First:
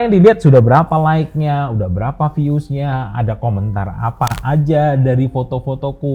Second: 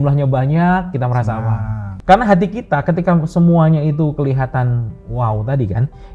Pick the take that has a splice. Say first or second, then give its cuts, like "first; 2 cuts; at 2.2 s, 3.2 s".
second; 1 cut; at 1.9 s